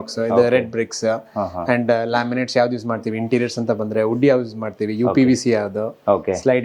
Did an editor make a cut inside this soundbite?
no; 0 cuts

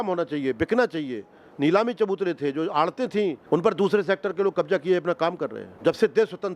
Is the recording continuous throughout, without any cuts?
no; 2 cuts; at 3.4 s, 5.7 s

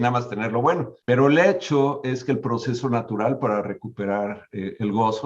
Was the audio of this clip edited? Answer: yes; 1 cut; at 0.9 s

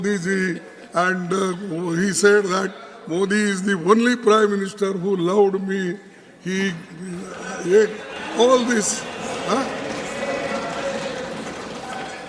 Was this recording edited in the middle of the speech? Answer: no; 0 cuts

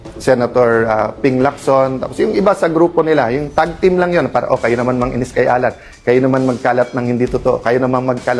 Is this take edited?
no; 0 cuts

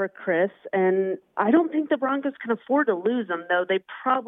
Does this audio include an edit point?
no; 0 cuts

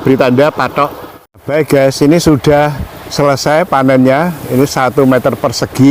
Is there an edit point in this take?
yes; 1 cut; at 1.4 s

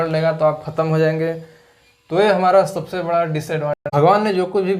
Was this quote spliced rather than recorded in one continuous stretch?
yes; 1 cut; at 3.8 s

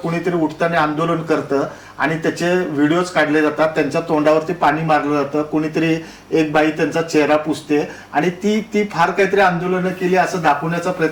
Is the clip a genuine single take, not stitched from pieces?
yes; 0 cuts

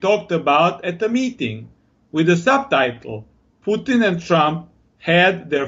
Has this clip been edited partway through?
yes; 1 cut; at 4.2 s

